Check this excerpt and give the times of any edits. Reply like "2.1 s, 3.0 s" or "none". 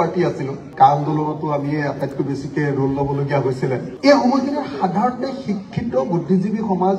3.9 s